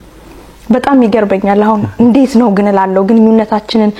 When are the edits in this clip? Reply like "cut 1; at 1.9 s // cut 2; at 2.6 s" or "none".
none

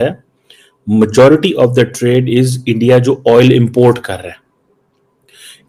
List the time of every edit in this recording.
none

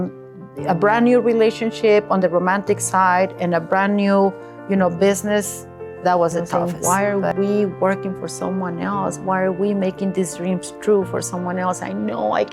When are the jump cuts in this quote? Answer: cut 1; at 6.5 s

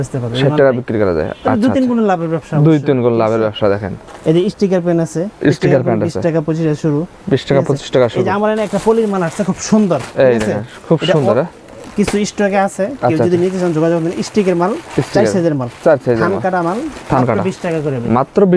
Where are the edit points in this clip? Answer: none

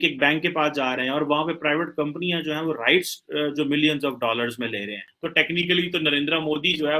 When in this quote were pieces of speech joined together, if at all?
cut 1; at 5.0 s

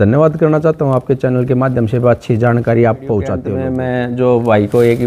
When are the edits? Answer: cut 1; at 3.5 s

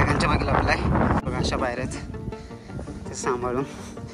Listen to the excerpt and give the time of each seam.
cut 1; at 1.2 s

